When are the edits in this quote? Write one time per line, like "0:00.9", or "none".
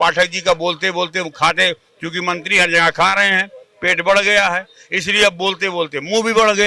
none